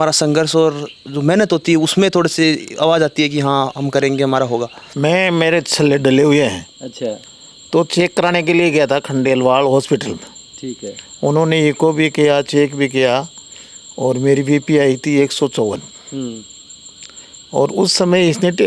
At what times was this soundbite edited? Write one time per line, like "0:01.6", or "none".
0:04.8